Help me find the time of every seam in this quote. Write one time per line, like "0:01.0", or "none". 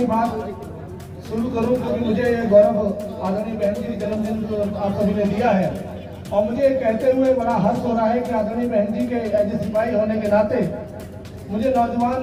none